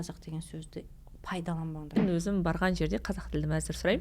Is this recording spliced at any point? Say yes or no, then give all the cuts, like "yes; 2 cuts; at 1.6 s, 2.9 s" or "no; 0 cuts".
yes; 1 cut; at 2.0 s